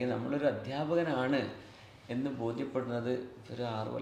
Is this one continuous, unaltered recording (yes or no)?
yes